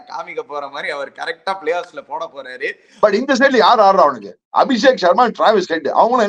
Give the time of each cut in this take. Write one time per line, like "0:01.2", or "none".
0:02.8